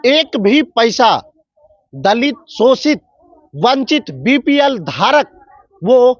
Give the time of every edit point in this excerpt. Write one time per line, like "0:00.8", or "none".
none